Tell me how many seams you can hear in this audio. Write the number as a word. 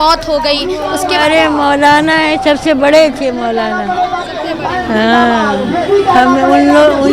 zero